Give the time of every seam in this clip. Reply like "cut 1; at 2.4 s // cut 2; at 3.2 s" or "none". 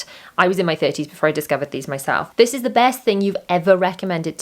cut 1; at 2.3 s